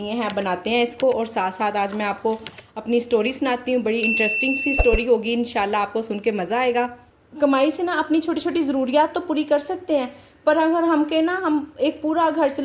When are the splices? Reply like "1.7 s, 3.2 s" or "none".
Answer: 7.3 s